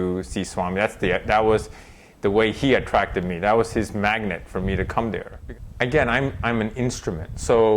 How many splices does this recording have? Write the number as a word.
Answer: one